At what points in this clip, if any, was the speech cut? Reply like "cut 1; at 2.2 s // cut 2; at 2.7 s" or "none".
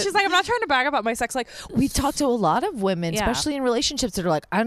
cut 1; at 1.6 s

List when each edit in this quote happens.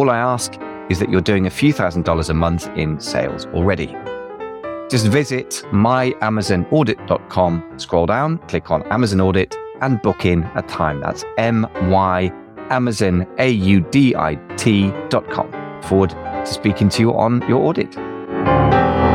cut 1; at 15.3 s // cut 2; at 18.4 s

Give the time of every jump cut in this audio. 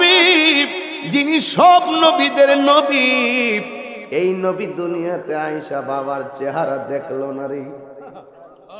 none

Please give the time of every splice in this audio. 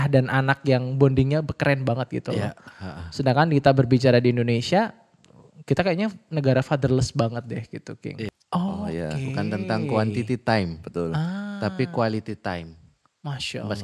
cut 1; at 8.3 s

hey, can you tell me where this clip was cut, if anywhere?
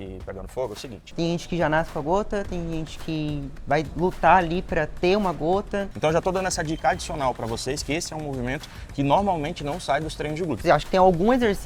cut 1; at 1.0 s // cut 2; at 5.9 s // cut 3; at 10.6 s

